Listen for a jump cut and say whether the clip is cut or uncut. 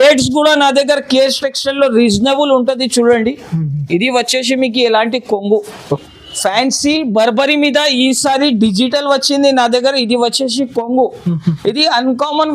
cut